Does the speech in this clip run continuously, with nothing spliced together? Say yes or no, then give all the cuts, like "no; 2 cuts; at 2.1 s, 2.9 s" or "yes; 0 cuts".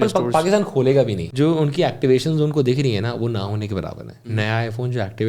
no; 2 cuts; at 1.2 s, 4.1 s